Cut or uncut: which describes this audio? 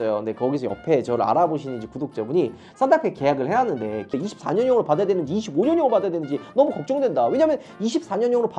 cut